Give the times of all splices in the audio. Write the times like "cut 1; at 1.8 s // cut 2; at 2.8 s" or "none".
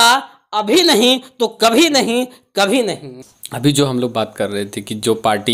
none